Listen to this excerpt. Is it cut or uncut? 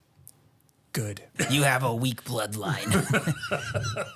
cut